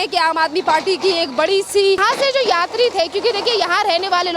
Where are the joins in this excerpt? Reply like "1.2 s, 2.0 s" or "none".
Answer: 2.0 s